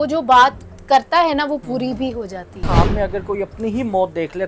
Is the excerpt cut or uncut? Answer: cut